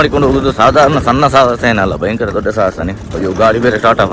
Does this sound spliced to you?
yes; 1 cut; at 3.0 s

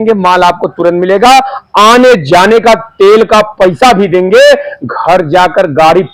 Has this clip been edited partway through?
no; 0 cuts

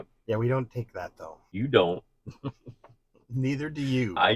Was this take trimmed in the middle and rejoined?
no; 0 cuts

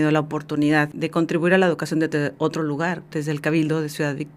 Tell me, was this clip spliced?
yes; 2 cuts; at 0.9 s, 3.1 s

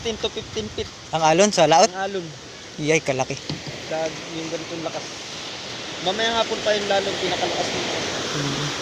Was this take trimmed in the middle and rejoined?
no; 0 cuts

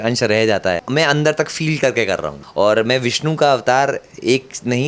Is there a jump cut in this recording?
yes; 2 cuts; at 0.8 s, 2.4 s

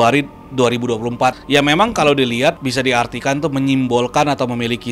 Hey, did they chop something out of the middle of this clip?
yes; 2 cuts; at 1.4 s, 2.6 s

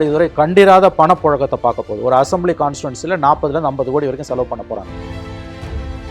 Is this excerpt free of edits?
no; 1 cut; at 4.8 s

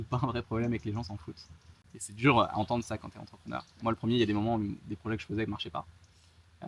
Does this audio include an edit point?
no; 0 cuts

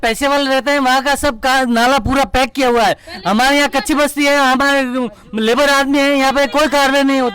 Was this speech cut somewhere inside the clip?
no; 0 cuts

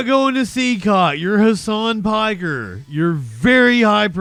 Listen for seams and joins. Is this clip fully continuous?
yes; 0 cuts

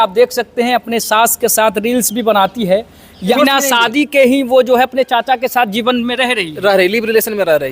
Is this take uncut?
no; 1 cut; at 3.0 s

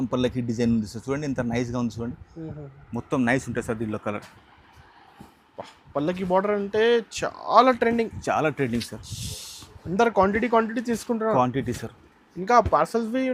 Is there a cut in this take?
no; 0 cuts

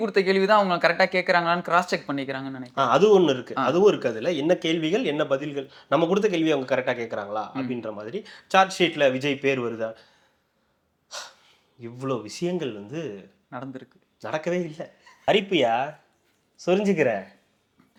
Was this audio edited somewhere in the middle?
no; 0 cuts

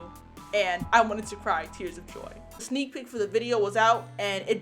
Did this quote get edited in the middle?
yes; 1 cut; at 2.6 s

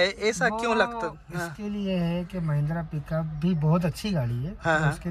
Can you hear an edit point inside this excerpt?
no; 0 cuts

